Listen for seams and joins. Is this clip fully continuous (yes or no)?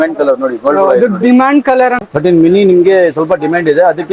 no